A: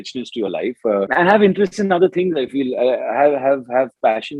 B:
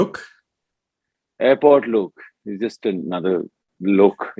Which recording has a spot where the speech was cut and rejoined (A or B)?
A